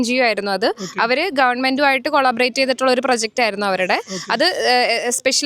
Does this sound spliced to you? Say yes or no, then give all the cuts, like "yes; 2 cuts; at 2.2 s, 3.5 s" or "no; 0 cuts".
no; 0 cuts